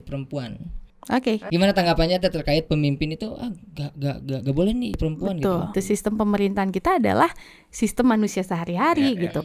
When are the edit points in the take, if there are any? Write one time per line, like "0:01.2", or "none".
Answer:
0:01.4
0:05.0
0:05.7